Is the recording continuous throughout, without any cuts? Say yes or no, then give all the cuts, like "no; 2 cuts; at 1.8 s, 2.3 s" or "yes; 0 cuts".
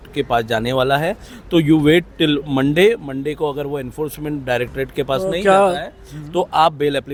yes; 0 cuts